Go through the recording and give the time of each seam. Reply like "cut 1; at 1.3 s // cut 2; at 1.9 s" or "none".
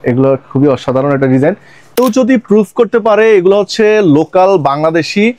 cut 1; at 2.0 s